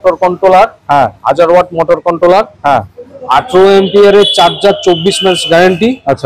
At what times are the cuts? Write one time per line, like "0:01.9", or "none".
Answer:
none